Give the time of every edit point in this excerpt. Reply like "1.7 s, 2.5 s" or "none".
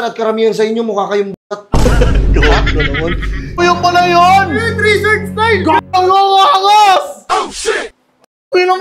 3.5 s